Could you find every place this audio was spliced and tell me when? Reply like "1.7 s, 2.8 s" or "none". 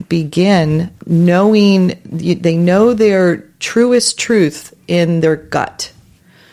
0.9 s